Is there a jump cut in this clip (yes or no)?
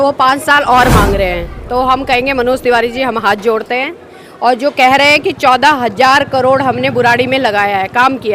no